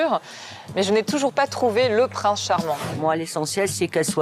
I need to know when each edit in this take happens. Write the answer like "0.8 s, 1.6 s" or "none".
2.9 s